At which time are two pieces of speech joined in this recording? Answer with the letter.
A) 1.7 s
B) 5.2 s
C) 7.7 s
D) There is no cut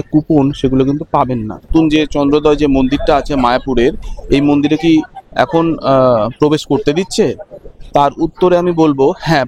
A